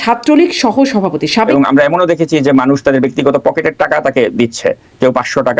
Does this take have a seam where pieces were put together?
yes; 1 cut; at 1.5 s

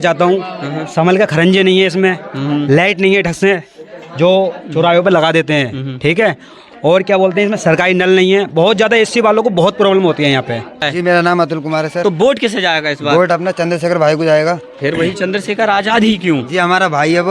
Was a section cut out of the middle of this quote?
yes; 1 cut; at 10.9 s

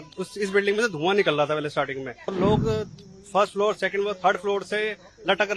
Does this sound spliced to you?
yes; 1 cut; at 2.3 s

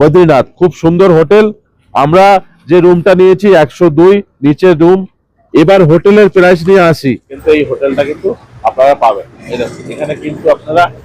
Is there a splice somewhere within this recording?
yes; 1 cut; at 7.3 s

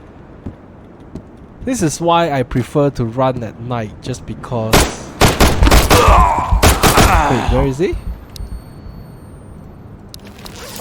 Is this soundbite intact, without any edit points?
yes; 0 cuts

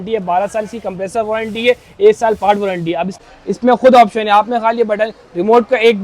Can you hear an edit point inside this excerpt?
yes; 1 cut; at 3.2 s

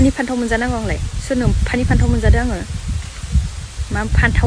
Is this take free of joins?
yes; 0 cuts

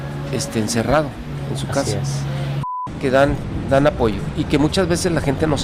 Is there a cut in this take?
yes; 1 cut; at 2.6 s

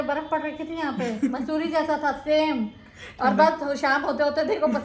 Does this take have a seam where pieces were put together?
no; 0 cuts

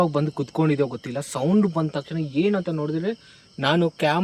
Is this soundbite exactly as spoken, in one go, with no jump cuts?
yes; 0 cuts

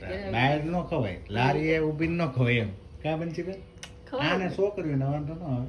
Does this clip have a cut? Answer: no; 0 cuts

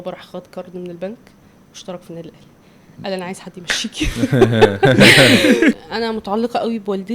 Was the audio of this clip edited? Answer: yes; 1 cut; at 5.8 s

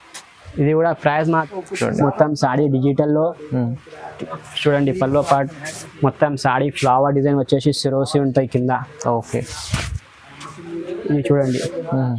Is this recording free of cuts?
no; 1 cut; at 1.4 s

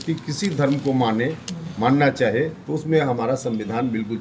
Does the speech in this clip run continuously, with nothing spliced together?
yes; 0 cuts

